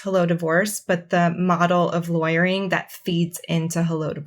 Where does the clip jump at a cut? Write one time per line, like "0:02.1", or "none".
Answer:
none

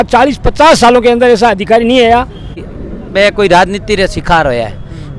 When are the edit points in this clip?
0:02.7

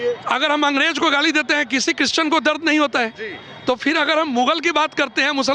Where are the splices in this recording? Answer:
none

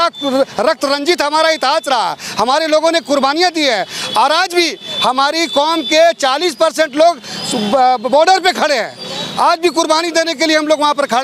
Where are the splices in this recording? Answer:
none

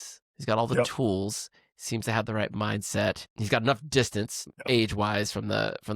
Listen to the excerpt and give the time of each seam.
0:03.3
0:04.5

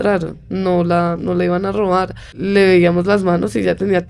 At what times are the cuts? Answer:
0:02.4

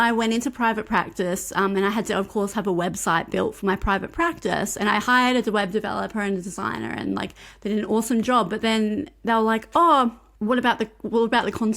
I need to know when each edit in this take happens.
0:10.3

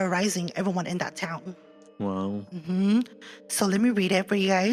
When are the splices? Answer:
none

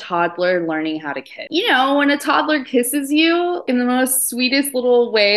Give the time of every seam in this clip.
0:01.4
0:03.6

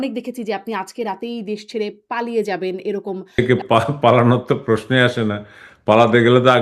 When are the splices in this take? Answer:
0:03.4

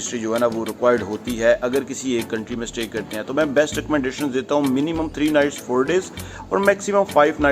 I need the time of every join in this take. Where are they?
none

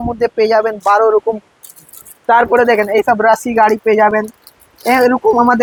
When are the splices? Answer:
none

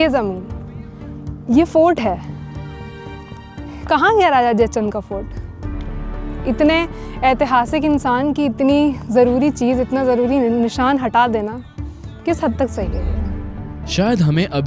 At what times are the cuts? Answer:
none

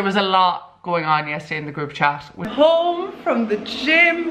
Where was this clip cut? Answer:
0:02.3

